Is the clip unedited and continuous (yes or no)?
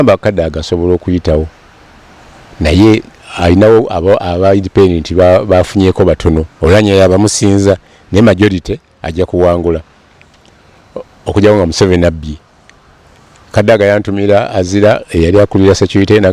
yes